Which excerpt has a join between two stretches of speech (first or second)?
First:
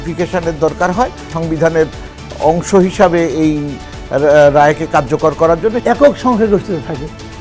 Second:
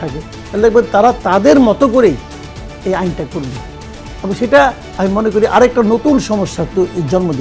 first